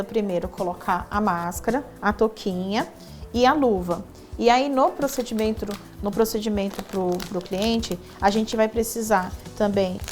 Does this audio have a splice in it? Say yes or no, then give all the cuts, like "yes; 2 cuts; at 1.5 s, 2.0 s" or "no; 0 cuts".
no; 0 cuts